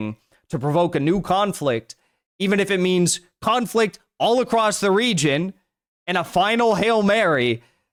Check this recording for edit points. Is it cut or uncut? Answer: uncut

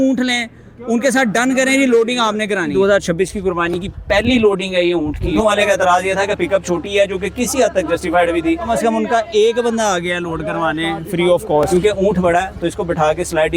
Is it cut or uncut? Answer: cut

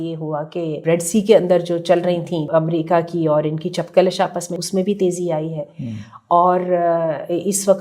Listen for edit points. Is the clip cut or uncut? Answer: cut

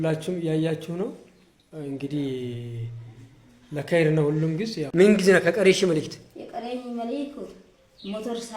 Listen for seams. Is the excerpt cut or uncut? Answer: cut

